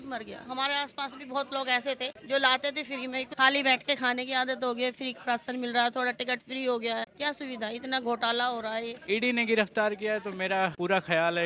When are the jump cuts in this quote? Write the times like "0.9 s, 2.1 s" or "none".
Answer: 3.3 s, 7.1 s, 9.0 s